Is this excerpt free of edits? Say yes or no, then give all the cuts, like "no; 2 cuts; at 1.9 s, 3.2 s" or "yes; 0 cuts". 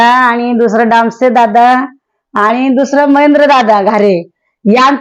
yes; 0 cuts